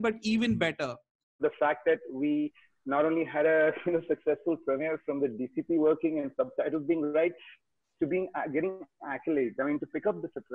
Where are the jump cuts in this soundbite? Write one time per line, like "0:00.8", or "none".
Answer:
0:01.4